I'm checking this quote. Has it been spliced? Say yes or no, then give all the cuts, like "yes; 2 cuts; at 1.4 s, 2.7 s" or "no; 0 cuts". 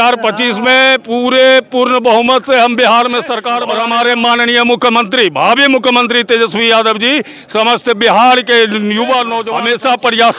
yes; 2 cuts; at 3.8 s, 9.4 s